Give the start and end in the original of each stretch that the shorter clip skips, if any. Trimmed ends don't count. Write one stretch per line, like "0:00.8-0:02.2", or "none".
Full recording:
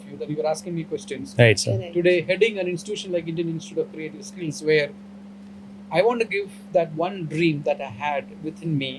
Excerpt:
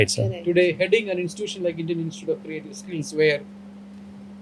none